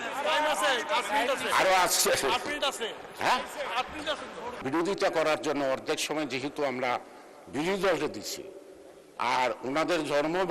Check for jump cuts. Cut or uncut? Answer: cut